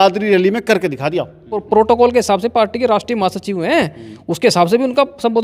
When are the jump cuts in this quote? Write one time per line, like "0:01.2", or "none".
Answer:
0:01.5